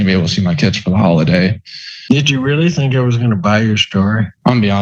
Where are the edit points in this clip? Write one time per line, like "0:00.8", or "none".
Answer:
0:01.6